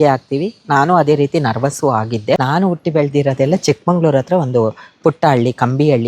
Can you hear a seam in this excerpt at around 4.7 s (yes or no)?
no